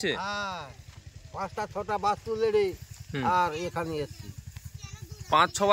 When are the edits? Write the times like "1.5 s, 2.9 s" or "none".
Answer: none